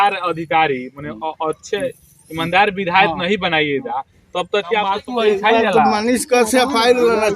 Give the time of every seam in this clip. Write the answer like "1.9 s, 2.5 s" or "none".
5.0 s